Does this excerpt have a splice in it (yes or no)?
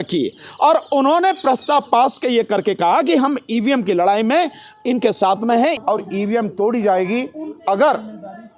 yes